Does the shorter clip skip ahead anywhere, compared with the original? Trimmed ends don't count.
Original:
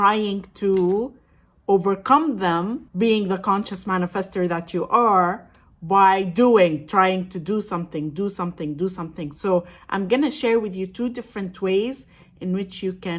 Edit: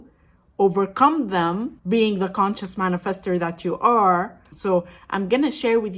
yes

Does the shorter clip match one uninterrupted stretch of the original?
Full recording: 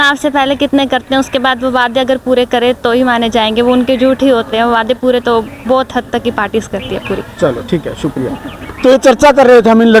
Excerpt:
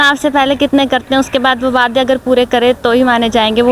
yes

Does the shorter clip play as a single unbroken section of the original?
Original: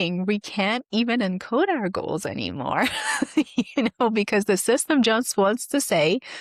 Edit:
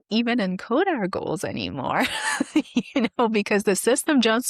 yes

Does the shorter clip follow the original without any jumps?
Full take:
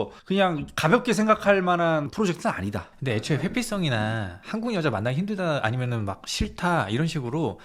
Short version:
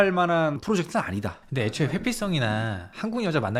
yes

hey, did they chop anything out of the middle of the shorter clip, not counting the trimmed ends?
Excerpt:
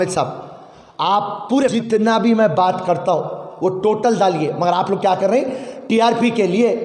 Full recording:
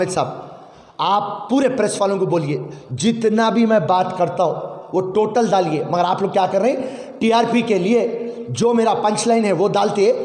yes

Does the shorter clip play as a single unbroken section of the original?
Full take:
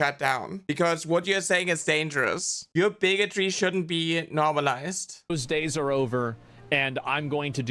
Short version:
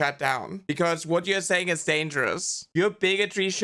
yes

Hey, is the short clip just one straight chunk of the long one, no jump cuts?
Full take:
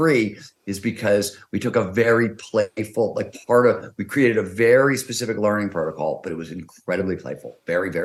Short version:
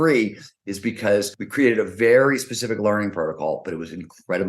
no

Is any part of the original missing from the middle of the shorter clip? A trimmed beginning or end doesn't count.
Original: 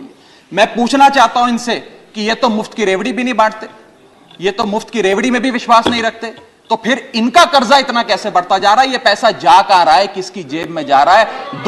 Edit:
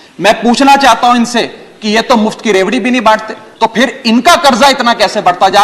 yes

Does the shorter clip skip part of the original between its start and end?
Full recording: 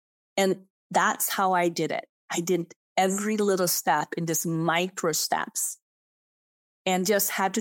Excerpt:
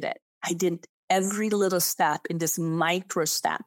no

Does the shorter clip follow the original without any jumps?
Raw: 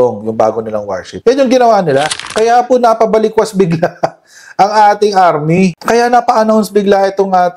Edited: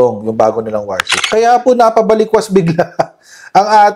no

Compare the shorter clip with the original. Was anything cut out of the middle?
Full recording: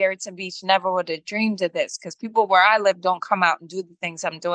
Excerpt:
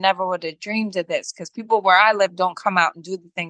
no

